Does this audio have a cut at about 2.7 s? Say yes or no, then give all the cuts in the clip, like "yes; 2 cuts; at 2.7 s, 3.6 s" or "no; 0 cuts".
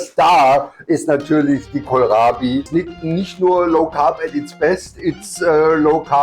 yes; 1 cut; at 2.7 s